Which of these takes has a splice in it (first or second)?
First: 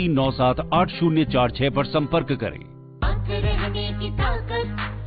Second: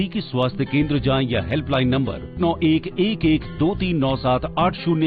first